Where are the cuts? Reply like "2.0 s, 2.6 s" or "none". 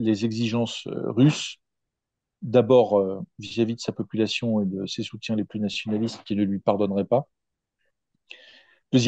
none